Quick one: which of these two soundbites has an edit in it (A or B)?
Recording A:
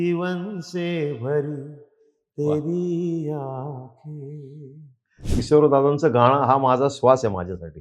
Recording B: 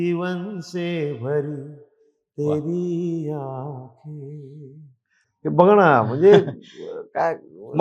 A